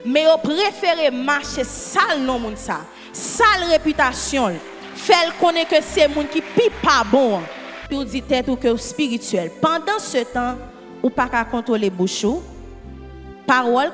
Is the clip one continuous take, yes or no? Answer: no